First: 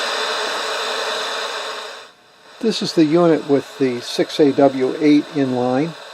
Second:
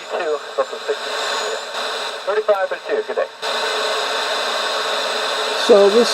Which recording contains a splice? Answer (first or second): second